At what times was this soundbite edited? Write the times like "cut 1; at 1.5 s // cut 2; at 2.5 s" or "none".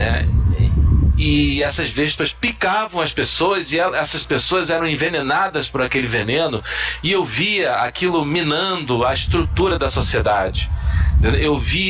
cut 1; at 5.1 s